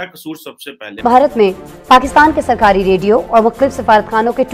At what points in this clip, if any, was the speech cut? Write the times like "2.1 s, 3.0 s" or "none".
1.0 s